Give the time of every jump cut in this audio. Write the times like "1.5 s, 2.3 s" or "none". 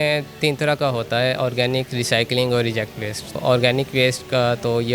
3.4 s